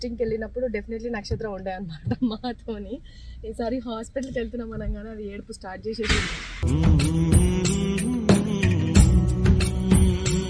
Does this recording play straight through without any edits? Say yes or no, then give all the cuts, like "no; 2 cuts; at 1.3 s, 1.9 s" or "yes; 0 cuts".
yes; 0 cuts